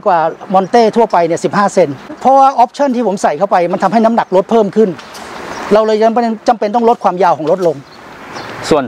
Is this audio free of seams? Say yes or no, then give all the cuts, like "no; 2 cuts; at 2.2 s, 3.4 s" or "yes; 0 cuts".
yes; 0 cuts